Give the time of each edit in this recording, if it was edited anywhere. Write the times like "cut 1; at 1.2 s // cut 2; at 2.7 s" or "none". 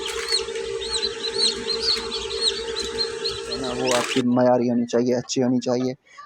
cut 1; at 3.8 s